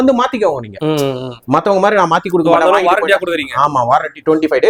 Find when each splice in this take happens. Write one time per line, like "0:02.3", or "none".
none